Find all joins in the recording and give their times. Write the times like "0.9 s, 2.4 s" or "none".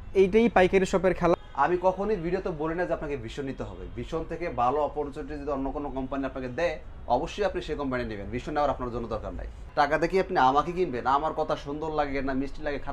1.3 s, 9.6 s